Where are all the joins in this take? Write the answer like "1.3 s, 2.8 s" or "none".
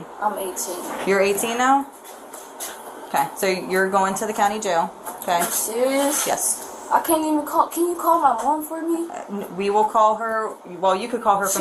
none